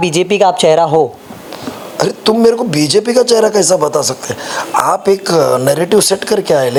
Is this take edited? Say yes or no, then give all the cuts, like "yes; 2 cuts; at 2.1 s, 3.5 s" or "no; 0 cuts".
no; 0 cuts